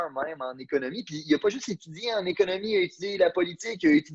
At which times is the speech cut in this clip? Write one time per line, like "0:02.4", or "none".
none